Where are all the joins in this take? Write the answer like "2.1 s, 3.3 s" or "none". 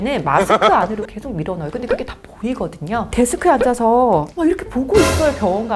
3.1 s

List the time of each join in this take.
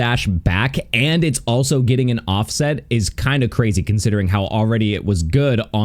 none

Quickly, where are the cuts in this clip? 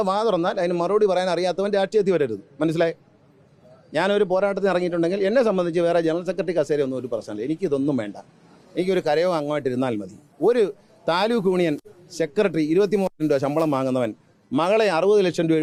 none

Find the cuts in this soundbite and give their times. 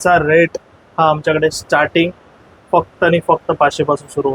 none

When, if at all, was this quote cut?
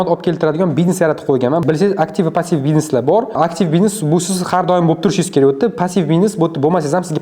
none

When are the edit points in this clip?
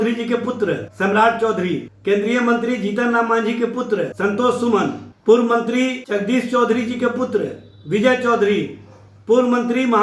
0.9 s, 1.9 s, 4.1 s, 5.1 s, 6.0 s

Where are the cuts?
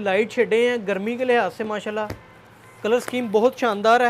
none

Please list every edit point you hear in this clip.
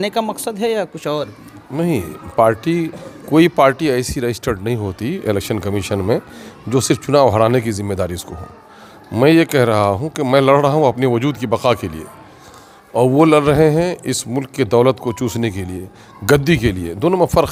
none

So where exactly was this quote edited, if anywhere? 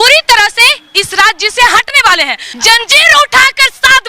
2.4 s

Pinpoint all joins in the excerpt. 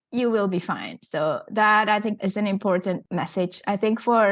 2.2 s, 3.0 s

